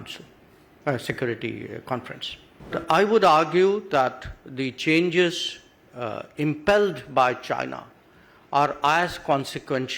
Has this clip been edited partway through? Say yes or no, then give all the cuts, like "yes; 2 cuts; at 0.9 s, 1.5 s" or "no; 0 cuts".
yes; 1 cut; at 2.7 s